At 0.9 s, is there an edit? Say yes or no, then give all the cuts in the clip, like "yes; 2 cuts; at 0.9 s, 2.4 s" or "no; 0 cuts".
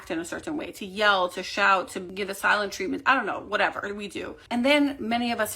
no; 2 cuts; at 2.1 s, 4.4 s